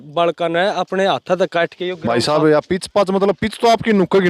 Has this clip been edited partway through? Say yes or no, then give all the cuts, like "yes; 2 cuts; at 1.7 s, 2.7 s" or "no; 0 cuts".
yes; 1 cut; at 2.0 s